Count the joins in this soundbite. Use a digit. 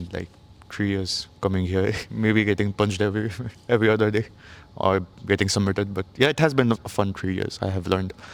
0